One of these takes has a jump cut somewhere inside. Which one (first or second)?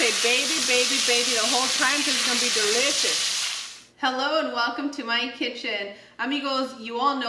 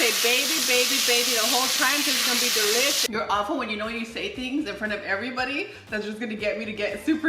second